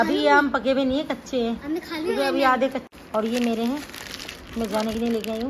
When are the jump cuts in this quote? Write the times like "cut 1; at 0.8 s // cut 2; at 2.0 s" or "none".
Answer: cut 1; at 2.8 s